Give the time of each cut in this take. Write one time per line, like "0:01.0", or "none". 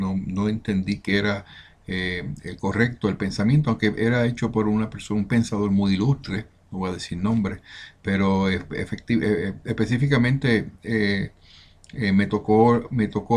0:04.7

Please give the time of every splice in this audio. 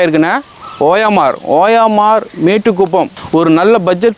0:03.2

